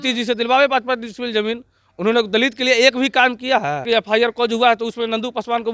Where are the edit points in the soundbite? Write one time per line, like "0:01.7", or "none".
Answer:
0:03.9